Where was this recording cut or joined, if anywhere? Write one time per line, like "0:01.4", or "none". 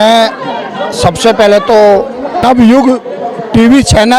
0:02.4